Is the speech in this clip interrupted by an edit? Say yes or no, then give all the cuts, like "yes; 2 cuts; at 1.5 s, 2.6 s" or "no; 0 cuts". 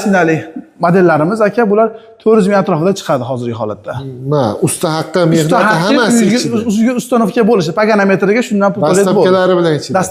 no; 0 cuts